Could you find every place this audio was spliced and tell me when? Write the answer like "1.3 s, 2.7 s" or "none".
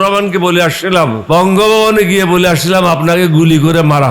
1.2 s